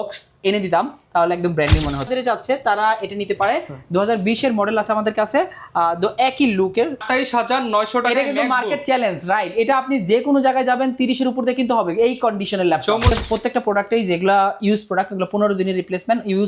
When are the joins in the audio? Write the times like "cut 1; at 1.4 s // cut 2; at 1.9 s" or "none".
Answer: cut 1; at 2.1 s // cut 2; at 7.0 s // cut 3; at 13.1 s

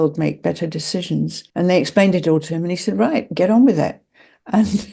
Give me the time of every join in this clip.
cut 1; at 1.4 s

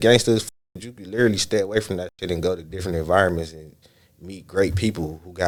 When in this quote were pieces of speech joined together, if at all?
none

